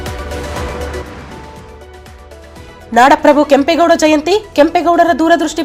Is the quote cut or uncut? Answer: uncut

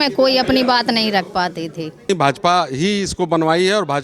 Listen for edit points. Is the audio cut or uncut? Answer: cut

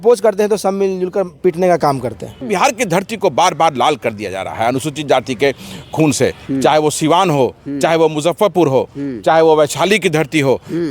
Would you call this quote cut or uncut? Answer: cut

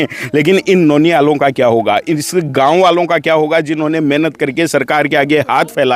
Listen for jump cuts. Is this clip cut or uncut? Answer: uncut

